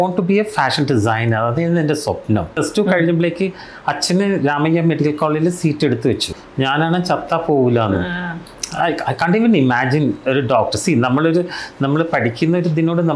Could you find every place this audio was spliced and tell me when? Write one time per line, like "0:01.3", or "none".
0:02.5
0:06.4